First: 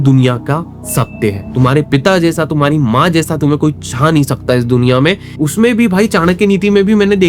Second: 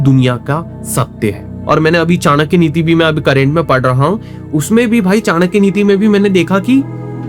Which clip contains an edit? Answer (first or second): first